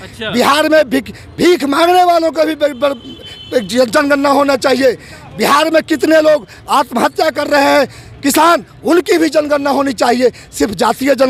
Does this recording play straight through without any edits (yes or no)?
yes